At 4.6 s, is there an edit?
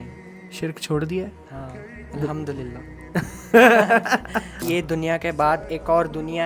yes; 1 cut; at 4.6 s

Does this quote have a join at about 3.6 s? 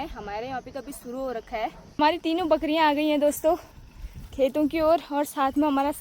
no; 1 cut; at 2.0 s

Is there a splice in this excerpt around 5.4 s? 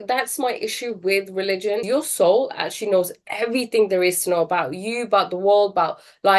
no; 1 cut; at 1.8 s

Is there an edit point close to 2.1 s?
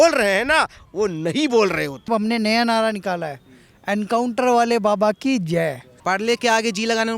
yes; 2 cuts; at 2.1 s, 5.9 s

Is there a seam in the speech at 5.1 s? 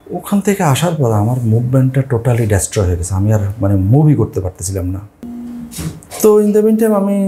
yes; 1 cut; at 5.1 s

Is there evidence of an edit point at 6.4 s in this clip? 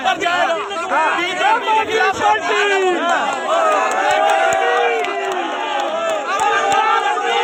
no; 0 cuts

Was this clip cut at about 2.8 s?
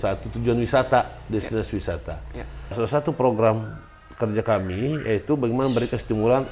yes; 1 cut; at 2.8 s

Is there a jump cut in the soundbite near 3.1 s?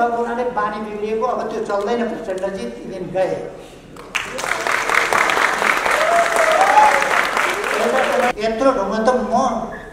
no; 1 cut; at 8.3 s

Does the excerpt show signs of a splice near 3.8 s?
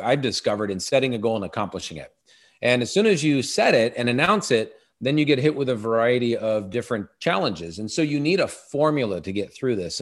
no; 0 cuts

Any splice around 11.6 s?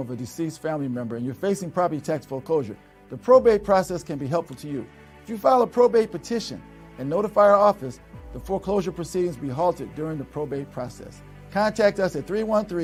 no; 0 cuts

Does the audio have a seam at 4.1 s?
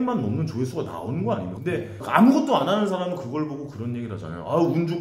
no; 1 cut; at 1.5 s

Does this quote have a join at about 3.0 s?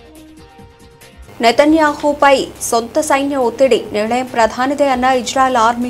no; 1 cut; at 1.2 s

